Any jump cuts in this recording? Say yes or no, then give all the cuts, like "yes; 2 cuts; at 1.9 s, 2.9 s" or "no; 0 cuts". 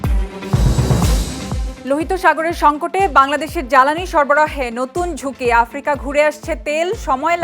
yes; 1 cut; at 1.7 s